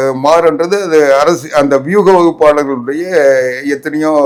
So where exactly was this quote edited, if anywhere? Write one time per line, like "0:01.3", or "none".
none